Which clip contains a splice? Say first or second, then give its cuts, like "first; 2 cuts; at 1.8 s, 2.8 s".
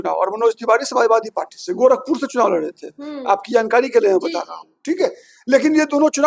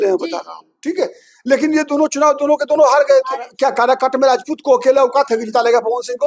second; 1 cut; at 3.5 s